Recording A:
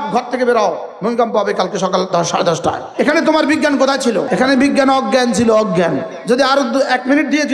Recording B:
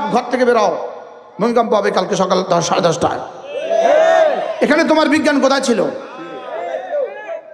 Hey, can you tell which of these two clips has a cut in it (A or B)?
A